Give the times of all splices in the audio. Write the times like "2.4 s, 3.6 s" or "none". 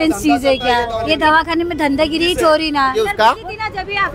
1.0 s, 3.0 s